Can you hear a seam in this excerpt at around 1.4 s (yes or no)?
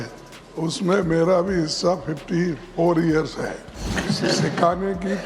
no